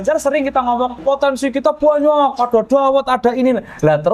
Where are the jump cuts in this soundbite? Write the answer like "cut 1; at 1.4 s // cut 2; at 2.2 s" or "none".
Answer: cut 1; at 1.0 s